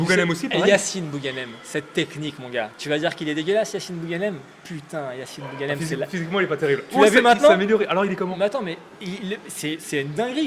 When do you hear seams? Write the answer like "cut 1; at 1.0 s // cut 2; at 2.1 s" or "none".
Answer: none